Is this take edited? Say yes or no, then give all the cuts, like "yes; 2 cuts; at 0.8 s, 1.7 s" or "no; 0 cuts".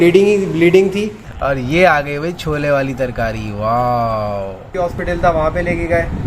yes; 2 cuts; at 1.2 s, 4.7 s